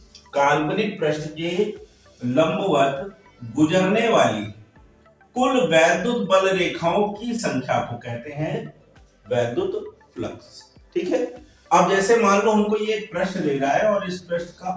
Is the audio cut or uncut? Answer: uncut